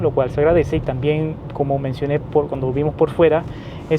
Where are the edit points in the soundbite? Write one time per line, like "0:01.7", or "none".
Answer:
none